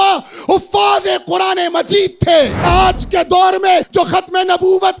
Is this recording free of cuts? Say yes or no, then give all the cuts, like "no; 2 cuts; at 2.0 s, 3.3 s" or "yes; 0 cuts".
no; 2 cuts; at 2.7 s, 3.9 s